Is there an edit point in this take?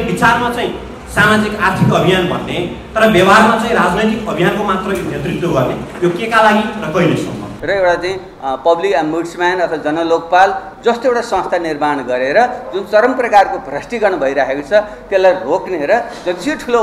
yes; 1 cut; at 7.5 s

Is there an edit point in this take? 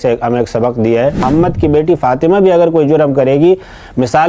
yes; 1 cut; at 1.2 s

